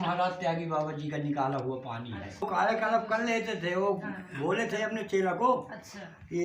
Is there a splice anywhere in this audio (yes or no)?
yes